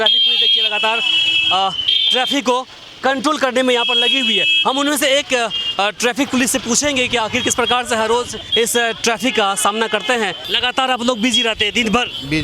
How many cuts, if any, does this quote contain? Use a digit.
2